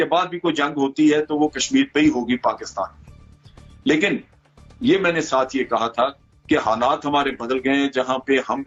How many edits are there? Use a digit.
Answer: 0